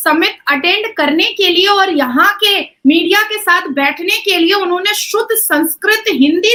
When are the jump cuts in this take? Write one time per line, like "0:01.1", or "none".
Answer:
none

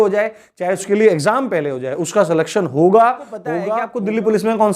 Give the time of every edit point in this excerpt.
0:03.6

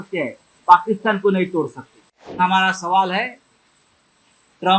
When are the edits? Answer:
0:02.4

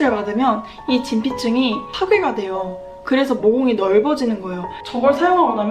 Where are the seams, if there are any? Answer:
0:04.8

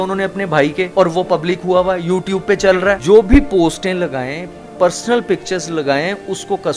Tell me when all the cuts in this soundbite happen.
none

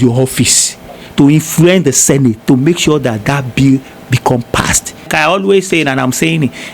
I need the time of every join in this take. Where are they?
0:05.1

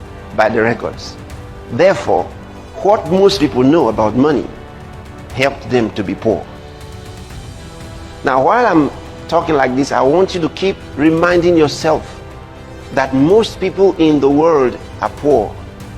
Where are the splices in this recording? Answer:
0:06.5
0:08.2

